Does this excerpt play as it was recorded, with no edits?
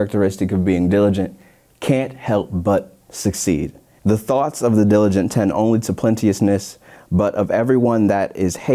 no; 1 cut; at 3.8 s

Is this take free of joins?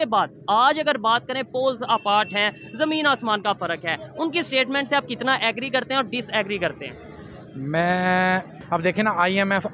no; 1 cut; at 8.6 s

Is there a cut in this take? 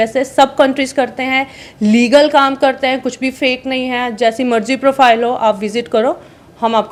no; 0 cuts

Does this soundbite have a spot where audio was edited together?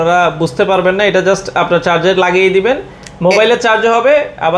no; 0 cuts

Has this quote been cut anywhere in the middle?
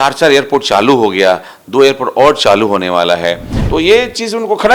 yes; 1 cut; at 3.5 s

